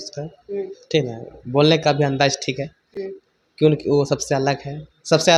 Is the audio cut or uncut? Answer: uncut